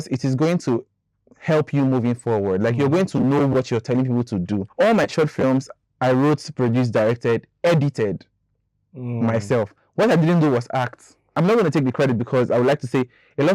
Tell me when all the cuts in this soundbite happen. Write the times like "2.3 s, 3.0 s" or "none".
4.7 s, 11.3 s